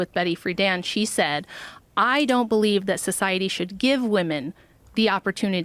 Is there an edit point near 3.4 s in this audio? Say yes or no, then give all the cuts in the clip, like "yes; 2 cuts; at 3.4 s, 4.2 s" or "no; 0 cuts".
no; 0 cuts